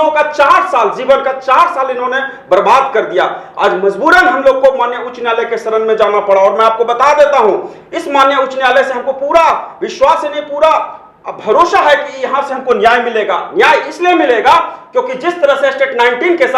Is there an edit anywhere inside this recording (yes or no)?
no